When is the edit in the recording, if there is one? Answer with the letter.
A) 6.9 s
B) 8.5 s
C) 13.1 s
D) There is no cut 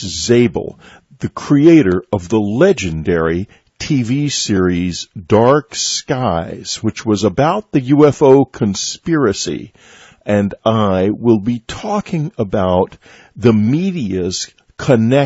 B